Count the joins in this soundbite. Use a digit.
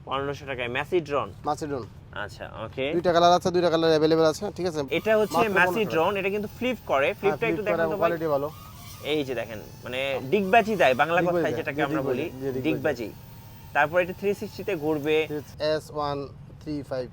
2